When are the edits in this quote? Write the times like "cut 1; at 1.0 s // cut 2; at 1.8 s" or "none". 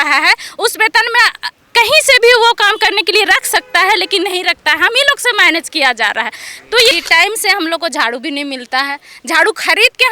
cut 1; at 6.9 s